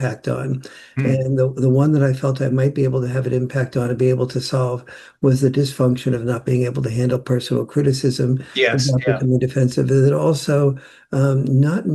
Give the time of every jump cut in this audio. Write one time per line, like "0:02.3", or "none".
none